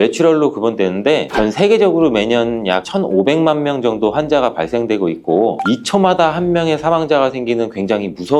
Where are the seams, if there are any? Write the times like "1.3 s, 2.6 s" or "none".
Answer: none